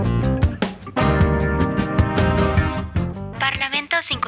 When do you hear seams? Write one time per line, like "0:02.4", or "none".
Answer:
0:03.3